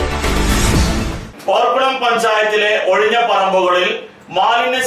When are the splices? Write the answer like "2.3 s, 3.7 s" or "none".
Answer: 1.2 s